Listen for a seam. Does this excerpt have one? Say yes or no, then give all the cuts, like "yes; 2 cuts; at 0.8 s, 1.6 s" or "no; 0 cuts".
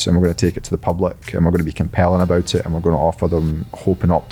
no; 0 cuts